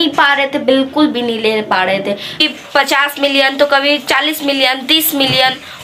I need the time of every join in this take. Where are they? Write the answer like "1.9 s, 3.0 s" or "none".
2.4 s